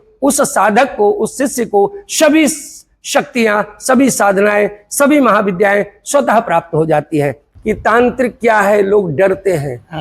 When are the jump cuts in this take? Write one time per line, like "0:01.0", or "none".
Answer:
0:07.4